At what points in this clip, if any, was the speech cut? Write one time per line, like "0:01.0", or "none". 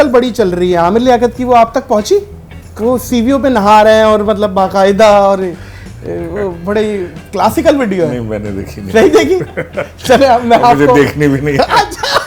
none